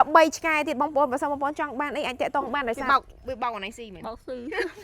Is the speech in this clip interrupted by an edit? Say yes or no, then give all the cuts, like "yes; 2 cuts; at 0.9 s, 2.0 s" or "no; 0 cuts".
yes; 1 cut; at 2.8 s